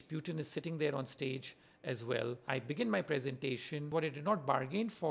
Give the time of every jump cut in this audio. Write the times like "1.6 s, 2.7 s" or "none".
2.4 s, 3.9 s

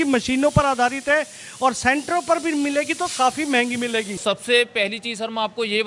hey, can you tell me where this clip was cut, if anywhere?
4.2 s

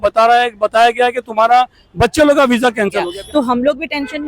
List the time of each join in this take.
3.0 s

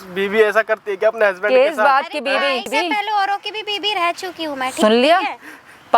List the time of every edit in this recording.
2.7 s, 4.7 s

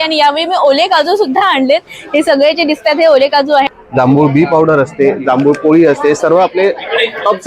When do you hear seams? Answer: 3.7 s

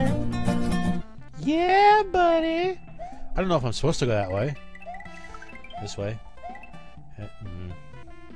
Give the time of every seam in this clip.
none

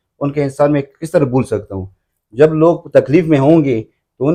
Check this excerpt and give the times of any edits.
none

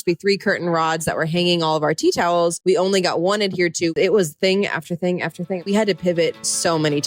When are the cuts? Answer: 2.6 s, 3.9 s, 5.6 s

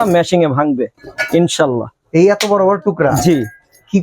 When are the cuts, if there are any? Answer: none

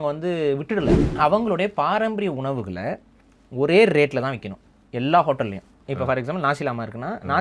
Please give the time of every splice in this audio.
1.1 s, 5.8 s

